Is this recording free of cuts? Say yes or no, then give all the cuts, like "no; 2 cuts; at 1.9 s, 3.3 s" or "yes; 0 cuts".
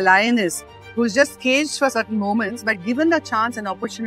yes; 0 cuts